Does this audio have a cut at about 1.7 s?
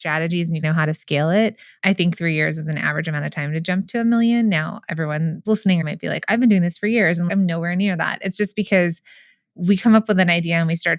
yes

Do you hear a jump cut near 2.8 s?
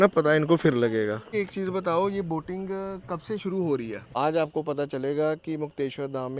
no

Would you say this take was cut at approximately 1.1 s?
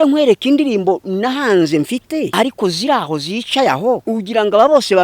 no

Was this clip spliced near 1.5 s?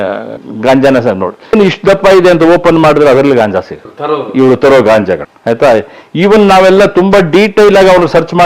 yes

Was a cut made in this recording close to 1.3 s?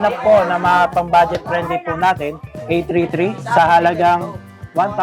no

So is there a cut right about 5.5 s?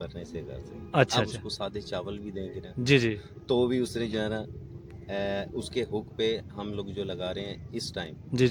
no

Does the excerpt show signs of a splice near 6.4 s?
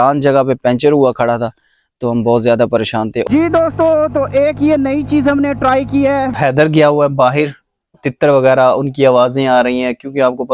yes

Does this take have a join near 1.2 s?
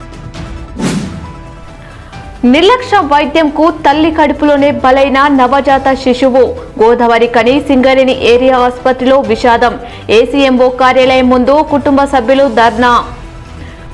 yes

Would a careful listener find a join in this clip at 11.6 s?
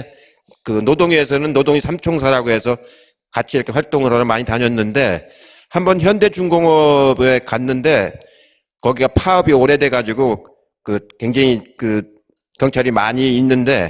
no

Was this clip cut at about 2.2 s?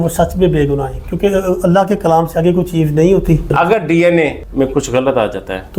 no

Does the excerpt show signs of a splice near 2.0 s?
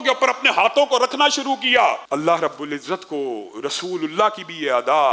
yes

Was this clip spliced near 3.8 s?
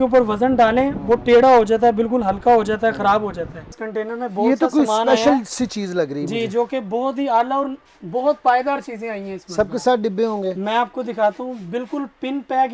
yes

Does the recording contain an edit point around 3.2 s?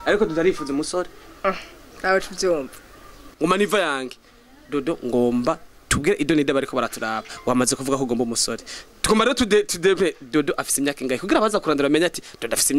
yes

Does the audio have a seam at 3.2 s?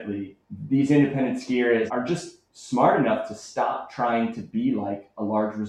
no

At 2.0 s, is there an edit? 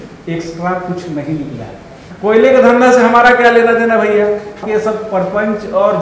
yes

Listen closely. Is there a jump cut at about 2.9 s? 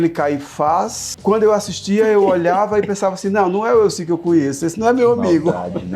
no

